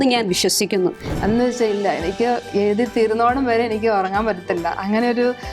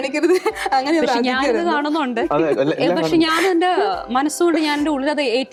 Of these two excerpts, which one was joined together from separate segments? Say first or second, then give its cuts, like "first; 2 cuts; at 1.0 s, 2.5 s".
first; 1 cut; at 1.1 s